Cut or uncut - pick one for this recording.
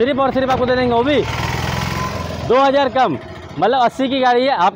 uncut